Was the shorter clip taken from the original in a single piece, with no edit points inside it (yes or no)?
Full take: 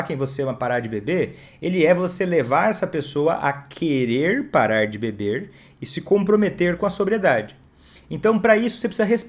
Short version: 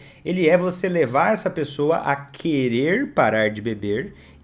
yes